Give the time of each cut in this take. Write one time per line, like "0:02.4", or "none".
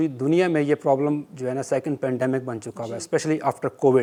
none